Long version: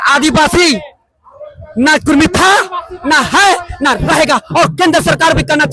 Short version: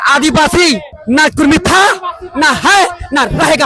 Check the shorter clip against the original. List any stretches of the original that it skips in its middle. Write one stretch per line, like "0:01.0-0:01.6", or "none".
0:00.9-0:01.6